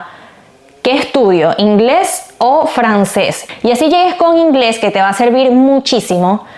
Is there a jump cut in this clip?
yes; 1 cut; at 3.4 s

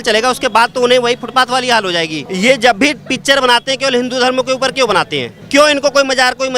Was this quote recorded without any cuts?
no; 2 cuts; at 2.2 s, 5.3 s

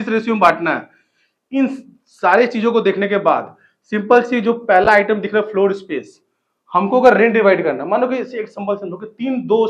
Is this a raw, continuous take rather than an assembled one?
yes; 0 cuts

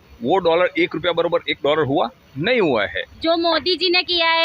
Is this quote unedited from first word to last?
no; 1 cut; at 3.1 s

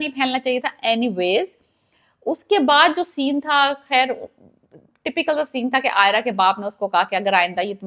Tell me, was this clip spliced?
no; 0 cuts

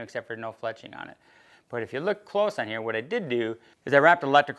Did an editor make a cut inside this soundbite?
yes; 1 cut; at 3.7 s

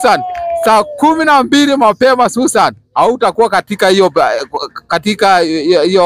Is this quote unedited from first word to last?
yes; 0 cuts

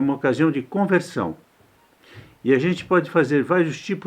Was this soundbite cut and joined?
no; 0 cuts

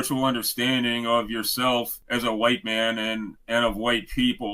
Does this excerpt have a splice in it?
yes; 1 cut; at 2.0 s

